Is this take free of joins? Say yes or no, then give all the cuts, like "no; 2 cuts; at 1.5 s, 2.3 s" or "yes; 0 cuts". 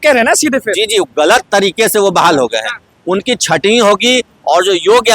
yes; 0 cuts